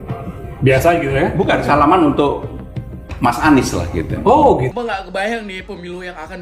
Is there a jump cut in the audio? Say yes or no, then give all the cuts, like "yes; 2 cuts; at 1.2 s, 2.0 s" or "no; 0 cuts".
yes; 1 cut; at 4.7 s